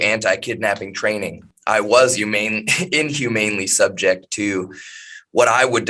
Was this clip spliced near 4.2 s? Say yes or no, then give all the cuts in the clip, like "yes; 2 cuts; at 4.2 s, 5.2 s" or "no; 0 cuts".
no; 1 cut; at 1.5 s